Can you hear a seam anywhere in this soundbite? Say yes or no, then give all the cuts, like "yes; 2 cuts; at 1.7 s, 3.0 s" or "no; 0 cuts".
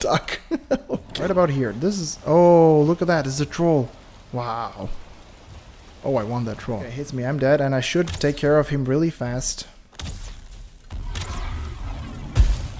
yes; 2 cuts; at 1.1 s, 7.0 s